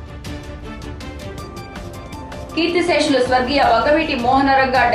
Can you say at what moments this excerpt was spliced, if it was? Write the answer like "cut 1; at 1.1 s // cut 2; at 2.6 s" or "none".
cut 1; at 1.3 s